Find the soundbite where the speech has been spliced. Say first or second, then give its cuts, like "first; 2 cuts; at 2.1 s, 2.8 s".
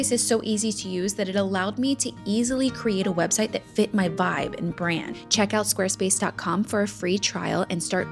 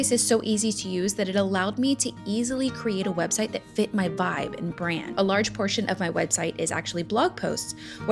first; 1 cut; at 5.1 s